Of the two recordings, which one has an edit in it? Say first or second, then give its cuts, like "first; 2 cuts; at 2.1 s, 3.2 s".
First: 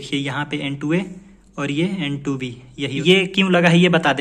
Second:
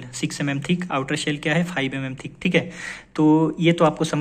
first; 1 cut; at 3.0 s